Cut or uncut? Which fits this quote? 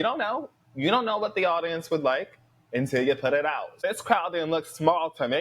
cut